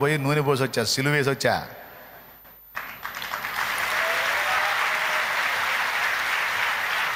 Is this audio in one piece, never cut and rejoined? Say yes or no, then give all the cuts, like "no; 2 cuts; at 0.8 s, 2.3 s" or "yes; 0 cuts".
yes; 0 cuts